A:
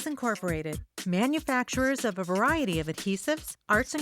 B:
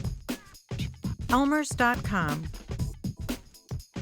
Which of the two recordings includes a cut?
B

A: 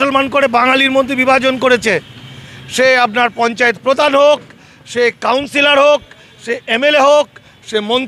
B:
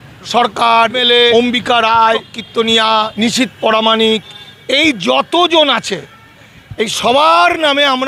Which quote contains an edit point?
B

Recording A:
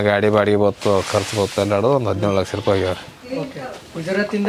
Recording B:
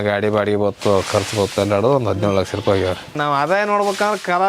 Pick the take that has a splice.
B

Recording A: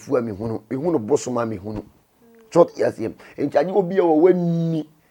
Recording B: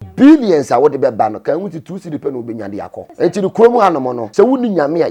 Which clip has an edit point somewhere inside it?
B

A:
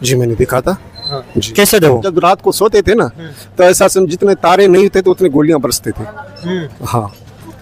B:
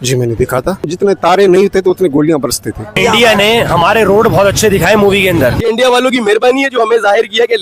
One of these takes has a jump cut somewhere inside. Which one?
B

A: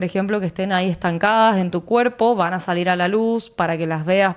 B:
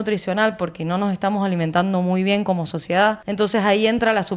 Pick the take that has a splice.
B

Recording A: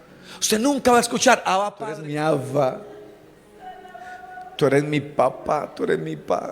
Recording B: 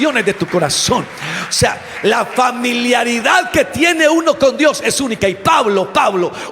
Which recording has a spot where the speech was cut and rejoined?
A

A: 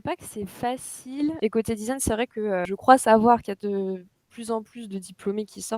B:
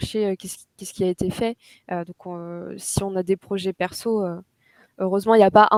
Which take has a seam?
A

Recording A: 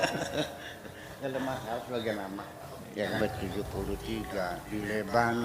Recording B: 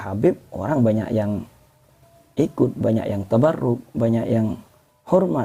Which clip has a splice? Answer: A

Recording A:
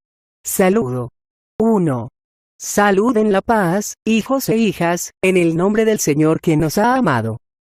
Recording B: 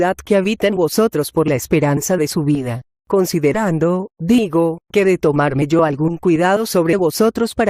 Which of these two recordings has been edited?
B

